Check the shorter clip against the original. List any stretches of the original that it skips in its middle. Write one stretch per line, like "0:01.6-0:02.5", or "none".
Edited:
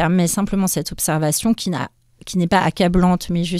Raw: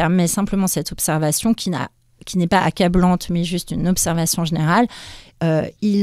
none